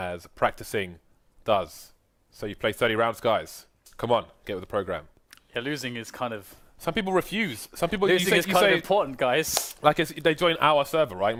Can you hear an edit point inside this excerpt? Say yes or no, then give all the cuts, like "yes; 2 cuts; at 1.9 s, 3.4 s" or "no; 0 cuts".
no; 0 cuts